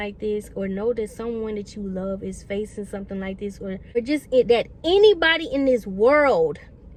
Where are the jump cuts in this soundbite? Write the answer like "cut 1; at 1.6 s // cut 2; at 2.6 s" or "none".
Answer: none